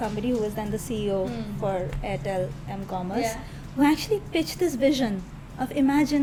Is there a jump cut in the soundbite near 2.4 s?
no; 0 cuts

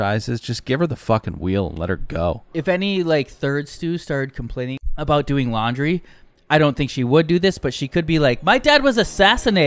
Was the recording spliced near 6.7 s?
no; 1 cut; at 4.9 s

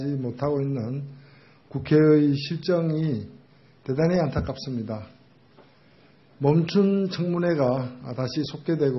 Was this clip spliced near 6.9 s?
yes; 1 cut; at 6.9 s

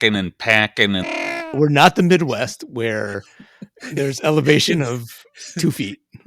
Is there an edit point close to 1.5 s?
yes; 1 cut; at 1.5 s

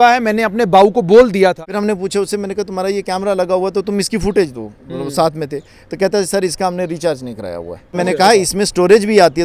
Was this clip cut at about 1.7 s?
yes; 2 cuts; at 1.7 s, 7.9 s

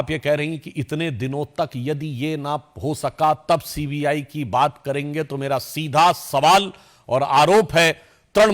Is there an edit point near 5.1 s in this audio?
no; 0 cuts

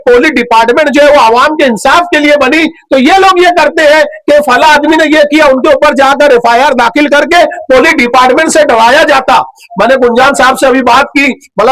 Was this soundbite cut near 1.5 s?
no; 0 cuts

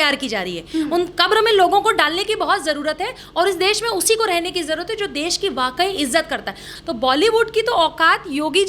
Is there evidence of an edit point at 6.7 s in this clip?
yes; 1 cut; at 6.7 s

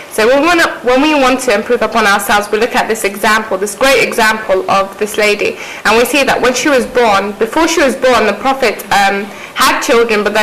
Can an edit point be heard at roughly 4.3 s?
yes; 1 cut; at 4.3 s

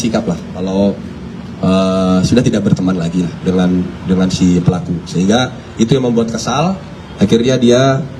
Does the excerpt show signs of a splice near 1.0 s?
no; 0 cuts

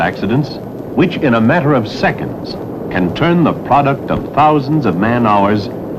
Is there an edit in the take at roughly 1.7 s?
no; 1 cut; at 4.6 s

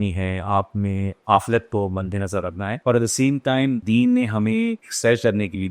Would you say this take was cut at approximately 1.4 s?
no; 3 cuts; at 2.7 s, 3.8 s, 4.9 s

